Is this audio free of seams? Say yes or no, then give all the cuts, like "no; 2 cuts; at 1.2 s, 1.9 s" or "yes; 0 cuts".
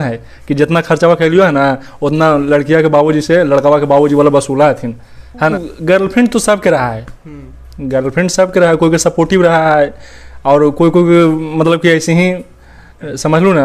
no; 1 cut; at 5.5 s